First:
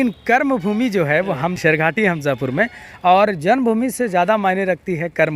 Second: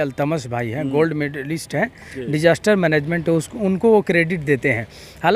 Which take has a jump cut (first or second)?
first